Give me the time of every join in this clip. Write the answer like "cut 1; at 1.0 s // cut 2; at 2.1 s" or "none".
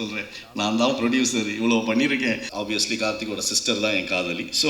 cut 1; at 2.5 s